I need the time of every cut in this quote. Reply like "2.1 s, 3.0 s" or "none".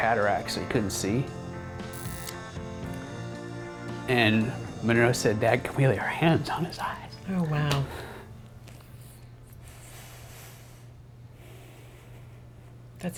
none